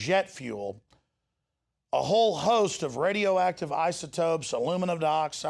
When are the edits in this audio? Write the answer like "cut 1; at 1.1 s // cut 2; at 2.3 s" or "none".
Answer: cut 1; at 2.1 s